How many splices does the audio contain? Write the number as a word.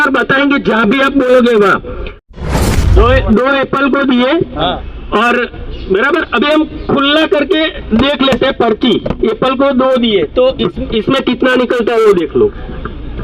one